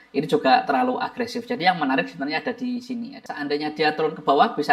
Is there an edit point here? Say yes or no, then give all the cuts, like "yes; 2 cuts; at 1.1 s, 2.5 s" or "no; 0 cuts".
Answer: yes; 1 cut; at 3.2 s